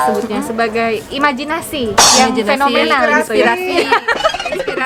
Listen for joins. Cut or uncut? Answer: uncut